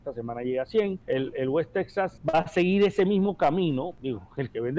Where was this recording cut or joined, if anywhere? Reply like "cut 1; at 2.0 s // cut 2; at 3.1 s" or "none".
cut 1; at 1.0 s // cut 2; at 2.2 s // cut 3; at 4.0 s